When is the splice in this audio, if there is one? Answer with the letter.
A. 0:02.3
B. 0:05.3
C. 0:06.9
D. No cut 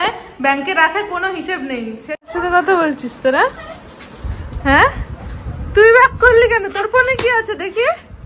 A